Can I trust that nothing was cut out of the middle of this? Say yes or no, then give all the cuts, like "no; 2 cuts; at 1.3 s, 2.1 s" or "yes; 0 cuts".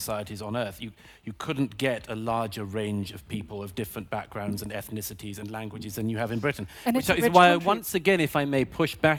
yes; 0 cuts